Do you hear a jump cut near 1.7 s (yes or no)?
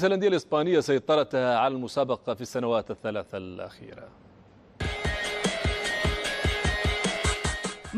no